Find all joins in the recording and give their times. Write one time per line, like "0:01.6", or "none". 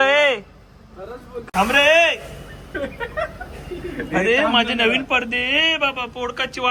0:01.3